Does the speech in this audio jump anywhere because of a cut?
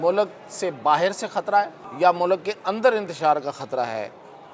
yes; 1 cut; at 1.8 s

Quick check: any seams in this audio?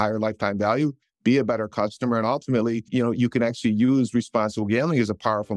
yes; 2 cuts; at 1.1 s, 2.9 s

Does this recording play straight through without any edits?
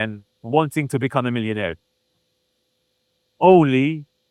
yes; 0 cuts

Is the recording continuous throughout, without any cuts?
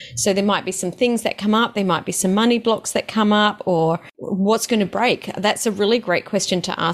no; 1 cut; at 4.1 s

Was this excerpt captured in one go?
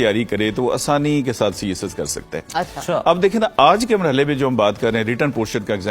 yes; 0 cuts

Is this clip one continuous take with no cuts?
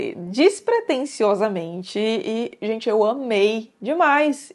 yes; 0 cuts

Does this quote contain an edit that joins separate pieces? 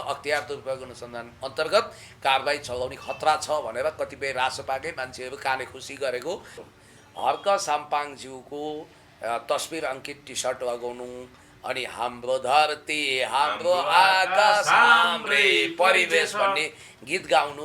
yes; 1 cut; at 6.6 s

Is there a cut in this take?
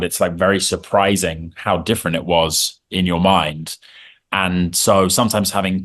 no; 0 cuts

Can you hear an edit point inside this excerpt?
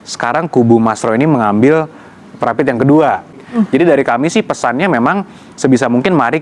yes; 1 cut; at 3.4 s

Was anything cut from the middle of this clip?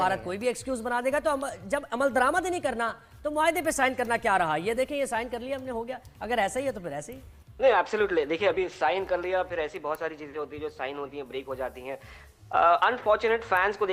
no; 0 cuts

